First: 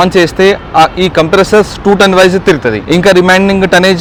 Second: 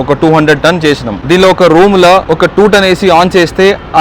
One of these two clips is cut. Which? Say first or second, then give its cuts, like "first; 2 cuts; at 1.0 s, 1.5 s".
second; 2 cuts; at 1.1 s, 2.3 s